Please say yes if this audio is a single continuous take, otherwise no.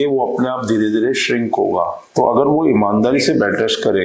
no